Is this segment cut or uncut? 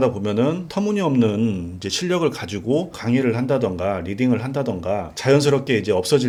uncut